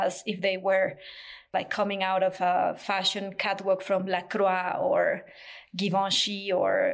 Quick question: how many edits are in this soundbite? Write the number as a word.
one